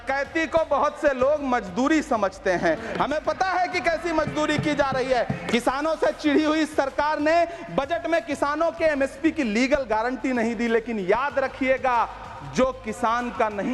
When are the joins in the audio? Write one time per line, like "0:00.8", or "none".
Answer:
0:05.4